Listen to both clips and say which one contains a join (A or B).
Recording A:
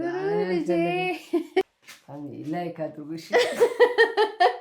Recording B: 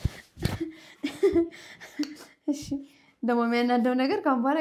A